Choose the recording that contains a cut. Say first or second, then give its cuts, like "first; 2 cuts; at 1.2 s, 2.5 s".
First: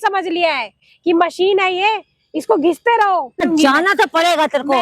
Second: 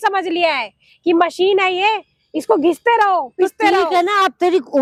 first; 1 cut; at 3.3 s